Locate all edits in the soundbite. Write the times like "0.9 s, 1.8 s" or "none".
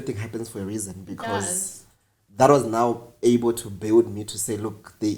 none